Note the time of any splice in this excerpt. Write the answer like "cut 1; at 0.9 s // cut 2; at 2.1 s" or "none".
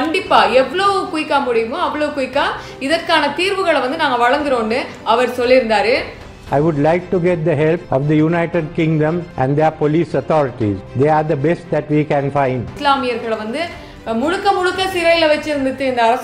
cut 1; at 6.4 s // cut 2; at 12.7 s